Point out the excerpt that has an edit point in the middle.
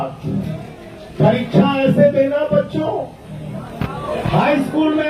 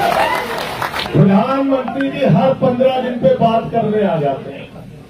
second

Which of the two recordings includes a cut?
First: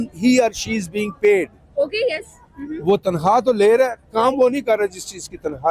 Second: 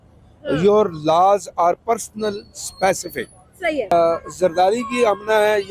second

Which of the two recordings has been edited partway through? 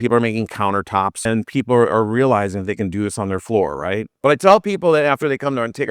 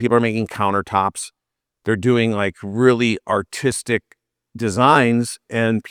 first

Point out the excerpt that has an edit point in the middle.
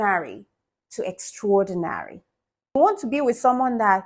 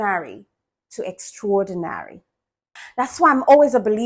first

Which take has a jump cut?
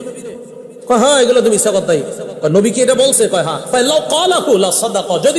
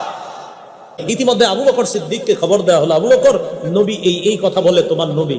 second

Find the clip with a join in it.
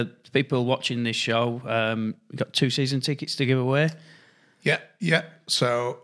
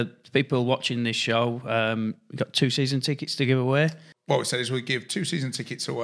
second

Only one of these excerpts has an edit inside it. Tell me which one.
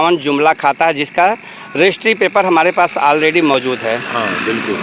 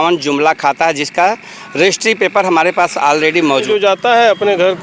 second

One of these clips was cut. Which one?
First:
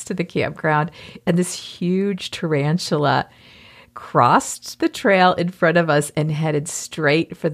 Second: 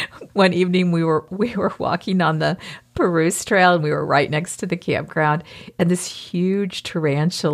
second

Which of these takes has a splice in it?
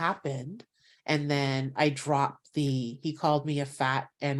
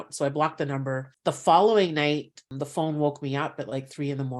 second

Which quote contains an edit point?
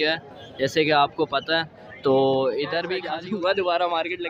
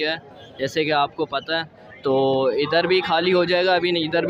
first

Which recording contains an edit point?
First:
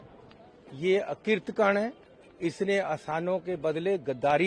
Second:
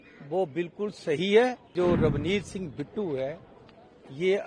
second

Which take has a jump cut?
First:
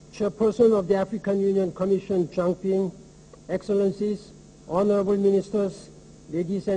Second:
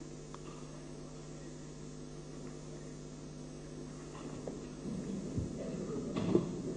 first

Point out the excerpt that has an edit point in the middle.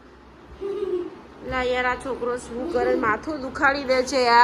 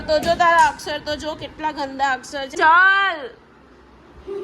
second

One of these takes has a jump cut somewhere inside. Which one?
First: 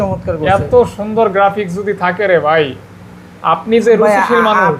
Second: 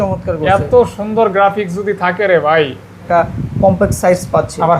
second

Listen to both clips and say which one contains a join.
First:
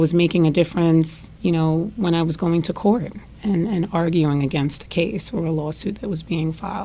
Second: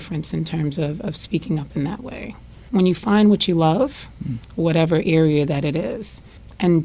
second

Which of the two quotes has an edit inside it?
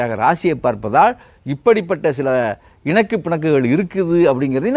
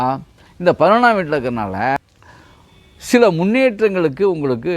second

